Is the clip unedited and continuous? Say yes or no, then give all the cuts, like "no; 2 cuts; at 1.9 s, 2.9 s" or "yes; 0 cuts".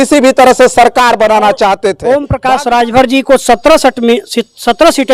no; 1 cut; at 2.0 s